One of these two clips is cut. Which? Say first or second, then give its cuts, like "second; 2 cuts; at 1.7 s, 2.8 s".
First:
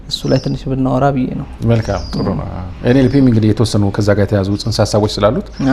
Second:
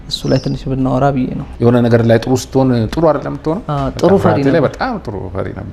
second; 1 cut; at 1.4 s